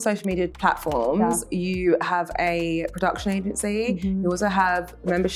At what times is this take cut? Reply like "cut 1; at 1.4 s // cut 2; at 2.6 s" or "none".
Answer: none